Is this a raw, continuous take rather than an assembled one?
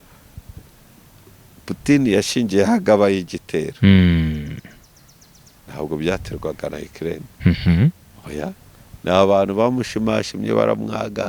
yes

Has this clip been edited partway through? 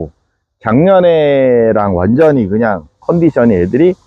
yes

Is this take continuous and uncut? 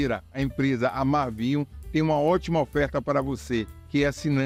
yes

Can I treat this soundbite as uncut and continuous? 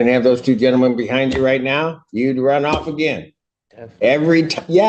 yes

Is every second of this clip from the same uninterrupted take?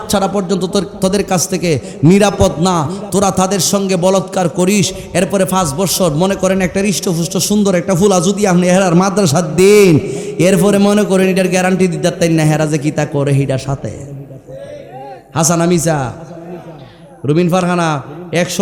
yes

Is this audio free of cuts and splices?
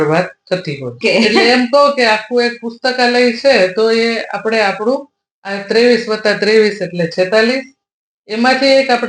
no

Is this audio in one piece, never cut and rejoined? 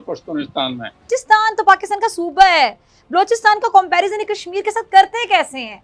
no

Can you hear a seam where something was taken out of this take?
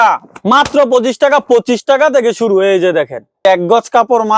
no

